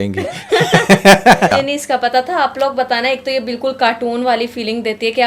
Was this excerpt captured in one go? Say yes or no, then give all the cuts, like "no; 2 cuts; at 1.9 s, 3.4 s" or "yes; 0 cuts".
no; 1 cut; at 1.5 s